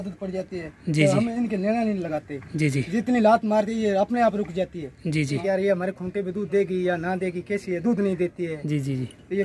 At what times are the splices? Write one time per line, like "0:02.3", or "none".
0:05.4